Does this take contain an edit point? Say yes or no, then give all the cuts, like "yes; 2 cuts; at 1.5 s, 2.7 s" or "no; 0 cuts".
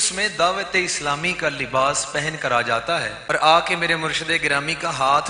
yes; 1 cut; at 3.2 s